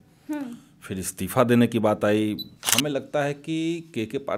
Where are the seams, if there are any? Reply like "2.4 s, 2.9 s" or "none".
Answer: 2.5 s